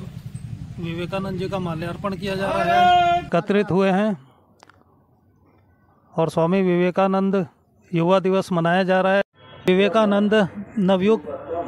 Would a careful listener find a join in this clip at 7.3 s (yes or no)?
no